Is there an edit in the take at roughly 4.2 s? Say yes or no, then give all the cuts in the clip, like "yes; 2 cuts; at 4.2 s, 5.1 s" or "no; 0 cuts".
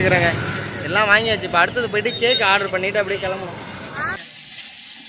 yes; 1 cut; at 4.2 s